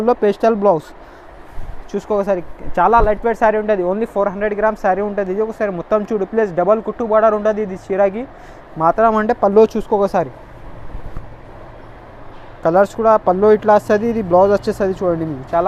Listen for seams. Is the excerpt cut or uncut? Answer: uncut